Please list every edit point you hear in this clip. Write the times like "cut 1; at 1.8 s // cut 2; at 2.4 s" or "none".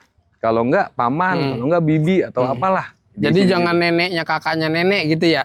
none